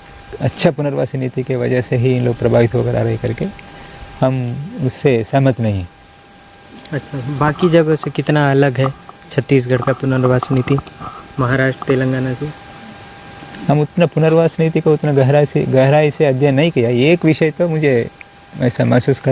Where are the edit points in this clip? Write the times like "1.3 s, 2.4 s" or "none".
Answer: none